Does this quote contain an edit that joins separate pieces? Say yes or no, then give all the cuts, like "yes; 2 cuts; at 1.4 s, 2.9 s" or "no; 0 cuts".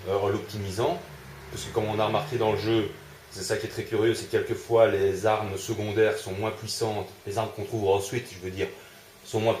yes; 1 cut; at 1.9 s